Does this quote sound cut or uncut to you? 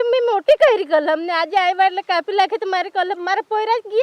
uncut